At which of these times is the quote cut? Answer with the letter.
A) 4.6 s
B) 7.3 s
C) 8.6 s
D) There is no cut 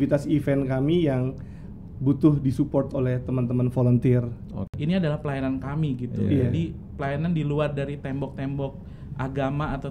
A